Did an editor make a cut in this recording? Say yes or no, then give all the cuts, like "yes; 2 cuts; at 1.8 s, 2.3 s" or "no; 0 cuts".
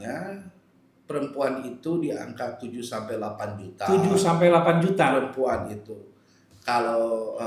no; 0 cuts